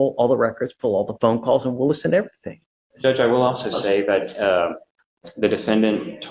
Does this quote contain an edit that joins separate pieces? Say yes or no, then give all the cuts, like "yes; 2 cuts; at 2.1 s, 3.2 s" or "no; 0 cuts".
no; 0 cuts